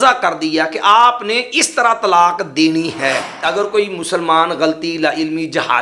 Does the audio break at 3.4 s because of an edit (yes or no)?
yes